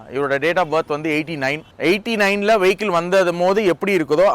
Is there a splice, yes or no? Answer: yes